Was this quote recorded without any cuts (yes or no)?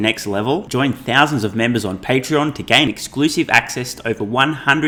yes